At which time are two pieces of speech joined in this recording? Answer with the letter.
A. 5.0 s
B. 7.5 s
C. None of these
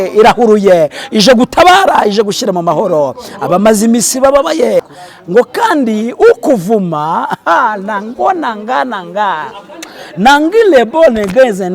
A